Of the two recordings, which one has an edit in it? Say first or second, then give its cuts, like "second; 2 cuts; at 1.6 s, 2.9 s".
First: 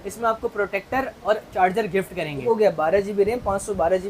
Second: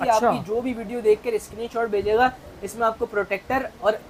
first; 1 cut; at 2.4 s